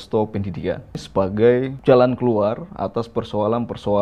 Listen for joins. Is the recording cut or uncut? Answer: cut